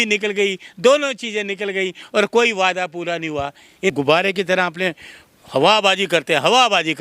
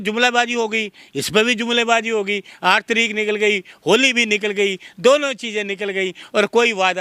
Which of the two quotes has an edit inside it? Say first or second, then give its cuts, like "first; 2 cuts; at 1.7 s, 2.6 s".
first; 1 cut; at 3.9 s